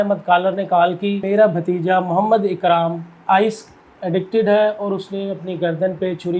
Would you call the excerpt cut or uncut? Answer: cut